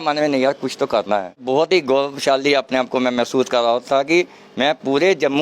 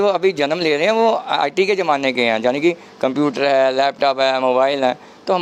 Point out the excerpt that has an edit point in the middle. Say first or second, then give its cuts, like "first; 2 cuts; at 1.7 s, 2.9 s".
first; 1 cut; at 1.4 s